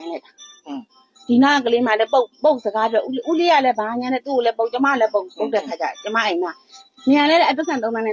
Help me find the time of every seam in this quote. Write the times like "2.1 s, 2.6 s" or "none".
none